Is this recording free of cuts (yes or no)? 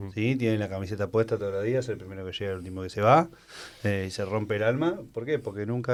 yes